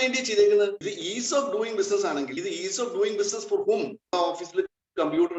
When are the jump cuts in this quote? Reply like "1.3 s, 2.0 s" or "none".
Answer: 0.9 s, 2.4 s, 4.1 s